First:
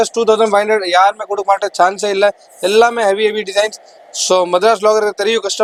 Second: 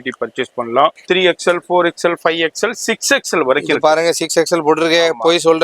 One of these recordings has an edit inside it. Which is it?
second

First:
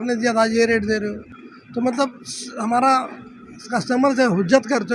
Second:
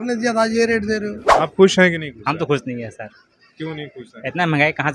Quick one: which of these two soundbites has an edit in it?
second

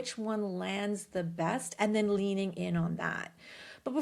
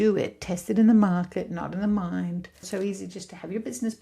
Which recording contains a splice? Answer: second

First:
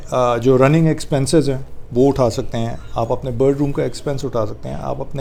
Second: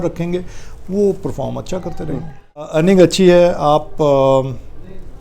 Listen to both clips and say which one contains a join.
second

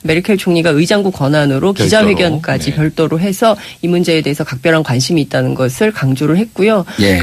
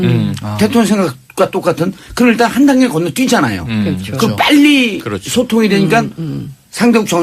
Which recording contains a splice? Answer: second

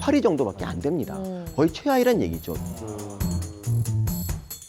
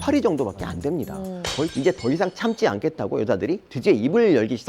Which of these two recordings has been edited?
second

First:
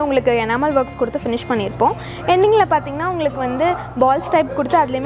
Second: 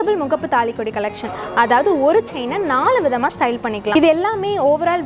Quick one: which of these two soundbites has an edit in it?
second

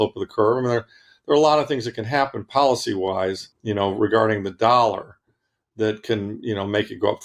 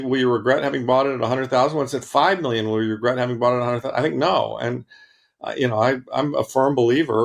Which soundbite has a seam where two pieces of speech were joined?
first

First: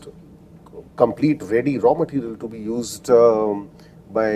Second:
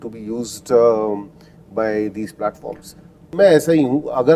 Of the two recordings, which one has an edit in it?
second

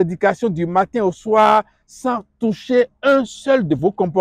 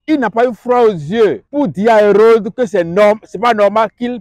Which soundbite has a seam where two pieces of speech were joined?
second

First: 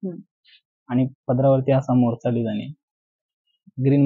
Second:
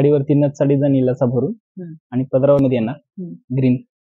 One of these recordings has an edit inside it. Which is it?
second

